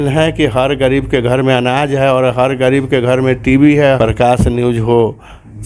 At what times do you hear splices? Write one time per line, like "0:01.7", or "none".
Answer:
0:04.0